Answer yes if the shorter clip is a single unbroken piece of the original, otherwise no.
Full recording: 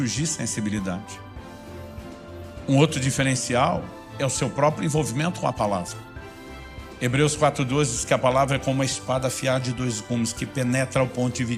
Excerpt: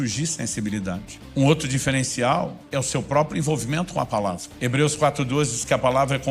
no